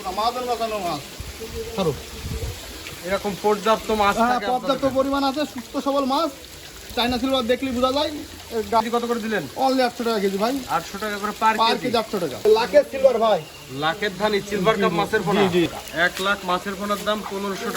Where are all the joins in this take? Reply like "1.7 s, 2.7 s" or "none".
1.2 s, 2.9 s, 8.8 s, 12.4 s, 15.7 s